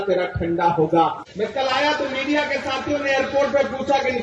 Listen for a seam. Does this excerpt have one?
yes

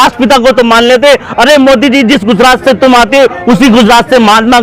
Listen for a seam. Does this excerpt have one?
no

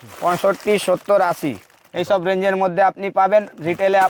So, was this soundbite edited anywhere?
no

